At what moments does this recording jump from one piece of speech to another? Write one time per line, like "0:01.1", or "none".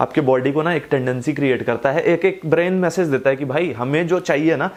none

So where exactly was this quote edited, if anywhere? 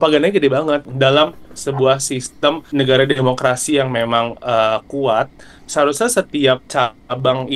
0:00.9
0:02.6
0:06.6

